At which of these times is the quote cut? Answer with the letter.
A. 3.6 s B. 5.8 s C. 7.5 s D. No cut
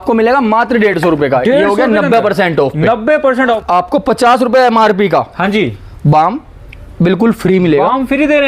A